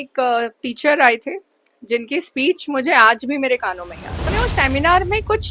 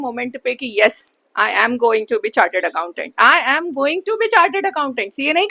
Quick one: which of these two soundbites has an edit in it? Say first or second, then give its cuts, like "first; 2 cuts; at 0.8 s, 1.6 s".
first; 1 cut; at 4.3 s